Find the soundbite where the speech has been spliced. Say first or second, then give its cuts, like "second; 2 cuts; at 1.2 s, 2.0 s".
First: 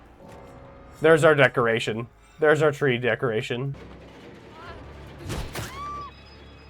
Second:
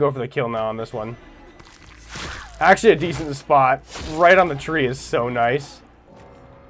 first; 1 cut; at 3.8 s